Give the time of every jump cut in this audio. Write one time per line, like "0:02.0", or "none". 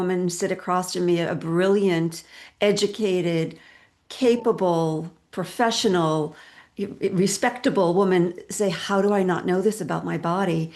none